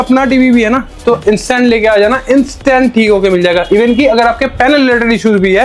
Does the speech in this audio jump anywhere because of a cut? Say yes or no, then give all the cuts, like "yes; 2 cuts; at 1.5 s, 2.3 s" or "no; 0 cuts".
no; 0 cuts